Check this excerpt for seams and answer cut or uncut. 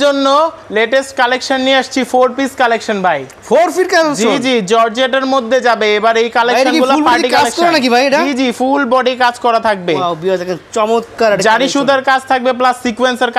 uncut